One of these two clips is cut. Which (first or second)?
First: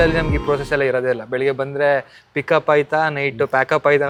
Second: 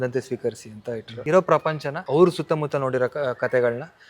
second